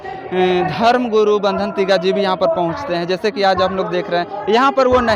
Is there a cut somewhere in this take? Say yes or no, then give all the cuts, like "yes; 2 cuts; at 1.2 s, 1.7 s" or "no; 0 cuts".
no; 0 cuts